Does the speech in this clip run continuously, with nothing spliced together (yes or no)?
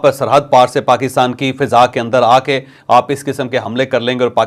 yes